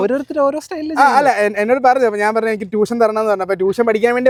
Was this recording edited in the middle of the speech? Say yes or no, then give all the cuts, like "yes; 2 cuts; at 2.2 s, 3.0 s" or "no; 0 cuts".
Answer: no; 0 cuts